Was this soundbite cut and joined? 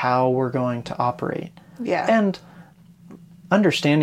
no; 0 cuts

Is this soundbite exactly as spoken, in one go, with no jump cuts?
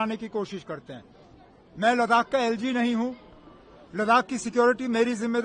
yes; 0 cuts

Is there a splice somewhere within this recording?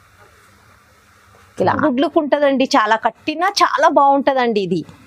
yes; 1 cut; at 1.8 s

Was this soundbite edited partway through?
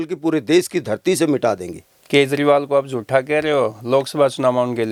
no; 0 cuts

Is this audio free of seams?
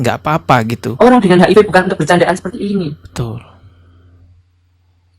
no; 1 cut; at 0.9 s

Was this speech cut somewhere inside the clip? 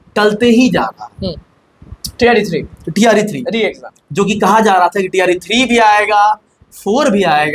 no; 0 cuts

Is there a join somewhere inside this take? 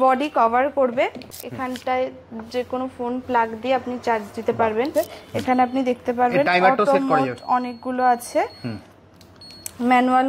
yes; 2 cuts; at 1.3 s, 4.9 s

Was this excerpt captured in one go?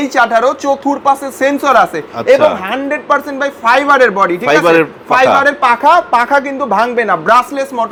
yes; 0 cuts

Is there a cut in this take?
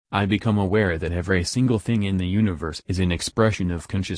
yes; 1 cut; at 1.1 s

